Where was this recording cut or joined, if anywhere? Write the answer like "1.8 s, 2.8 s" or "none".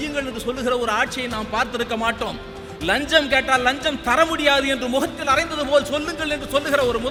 none